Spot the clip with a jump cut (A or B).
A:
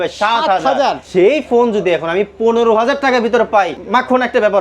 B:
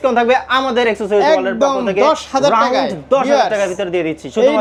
A